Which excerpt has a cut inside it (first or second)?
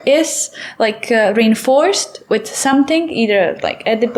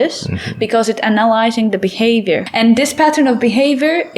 second